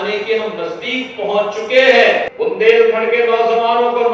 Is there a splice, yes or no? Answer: yes